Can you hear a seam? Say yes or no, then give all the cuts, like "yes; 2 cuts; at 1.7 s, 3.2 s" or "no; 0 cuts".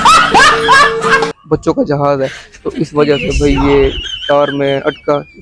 yes; 1 cut; at 1.2 s